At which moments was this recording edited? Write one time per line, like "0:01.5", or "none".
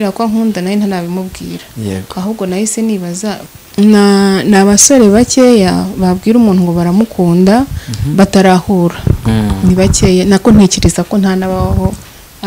0:03.5